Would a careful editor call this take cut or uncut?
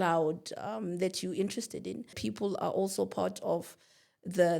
cut